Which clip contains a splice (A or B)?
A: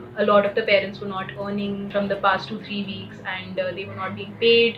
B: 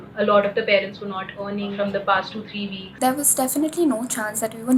B